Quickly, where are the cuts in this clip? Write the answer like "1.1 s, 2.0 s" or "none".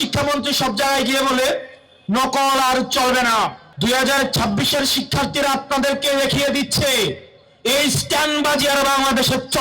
3.6 s